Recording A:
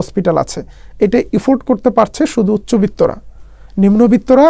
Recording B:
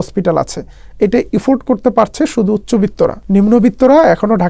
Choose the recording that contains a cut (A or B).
B